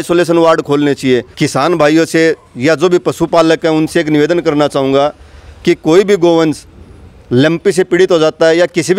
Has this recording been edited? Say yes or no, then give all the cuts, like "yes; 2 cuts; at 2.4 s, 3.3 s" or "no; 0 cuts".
yes; 1 cut; at 1.3 s